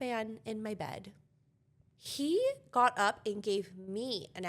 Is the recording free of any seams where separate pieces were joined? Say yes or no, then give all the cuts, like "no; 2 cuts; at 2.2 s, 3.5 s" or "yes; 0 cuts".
no; 1 cut; at 1.5 s